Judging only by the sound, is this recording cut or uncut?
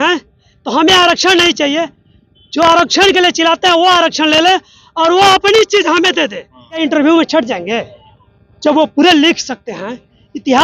cut